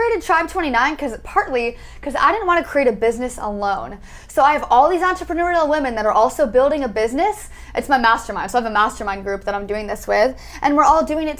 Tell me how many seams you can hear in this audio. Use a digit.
0